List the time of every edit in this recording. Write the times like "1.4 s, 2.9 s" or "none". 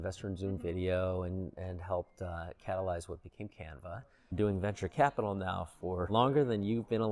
4.3 s, 6.1 s